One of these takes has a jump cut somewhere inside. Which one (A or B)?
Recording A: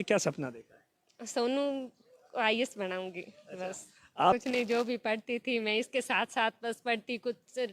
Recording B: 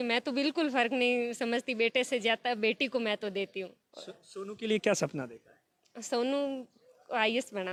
A